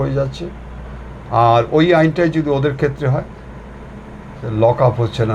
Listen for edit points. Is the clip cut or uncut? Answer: uncut